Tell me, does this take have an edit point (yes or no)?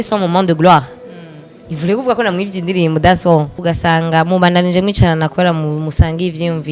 yes